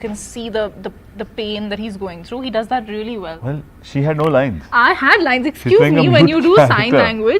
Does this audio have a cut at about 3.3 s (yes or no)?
yes